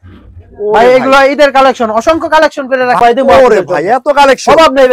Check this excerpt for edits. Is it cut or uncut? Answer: cut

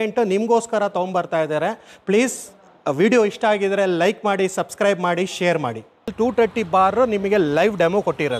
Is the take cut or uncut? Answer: cut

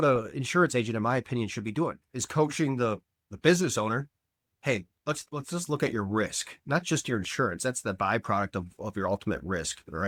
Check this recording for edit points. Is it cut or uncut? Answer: uncut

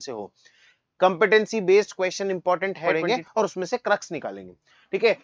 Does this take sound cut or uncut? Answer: cut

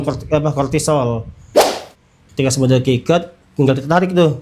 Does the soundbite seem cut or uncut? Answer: cut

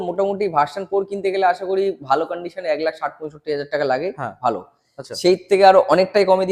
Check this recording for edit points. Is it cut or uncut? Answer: uncut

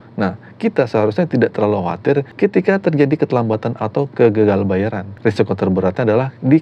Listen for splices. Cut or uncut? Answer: cut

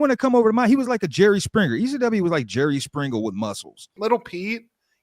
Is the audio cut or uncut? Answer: cut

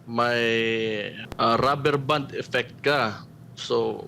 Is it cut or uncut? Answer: cut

